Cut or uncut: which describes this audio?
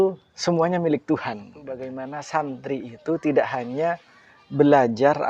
cut